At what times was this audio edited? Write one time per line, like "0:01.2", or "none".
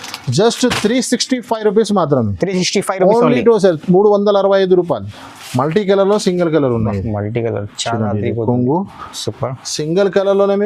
0:05.2